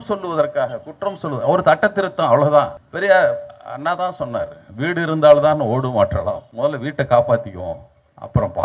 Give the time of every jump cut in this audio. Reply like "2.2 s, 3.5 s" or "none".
2.8 s, 6.5 s